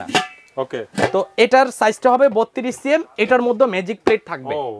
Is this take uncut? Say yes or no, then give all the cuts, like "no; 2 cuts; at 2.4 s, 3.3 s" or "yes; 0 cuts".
yes; 0 cuts